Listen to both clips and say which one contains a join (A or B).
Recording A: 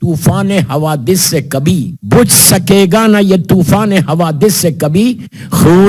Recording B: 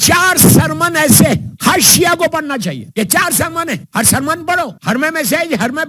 B